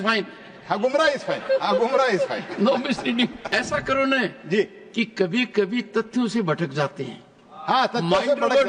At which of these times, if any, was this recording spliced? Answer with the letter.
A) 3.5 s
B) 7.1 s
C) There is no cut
A